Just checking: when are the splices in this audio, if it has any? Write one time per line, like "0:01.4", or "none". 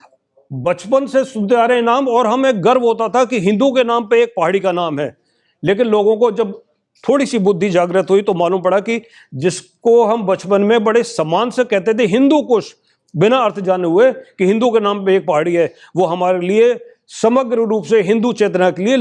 none